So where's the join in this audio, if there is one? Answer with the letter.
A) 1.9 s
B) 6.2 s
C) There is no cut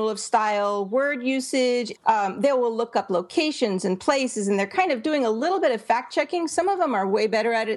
A